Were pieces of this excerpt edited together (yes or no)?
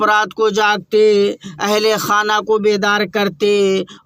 no